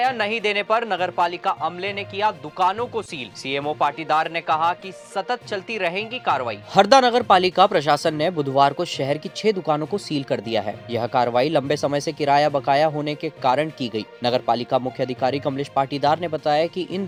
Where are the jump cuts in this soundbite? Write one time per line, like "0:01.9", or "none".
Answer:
none